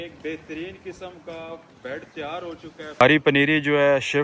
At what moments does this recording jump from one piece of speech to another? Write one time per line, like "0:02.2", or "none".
0:03.0